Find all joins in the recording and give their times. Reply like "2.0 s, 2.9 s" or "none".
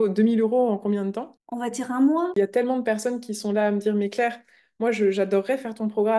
2.3 s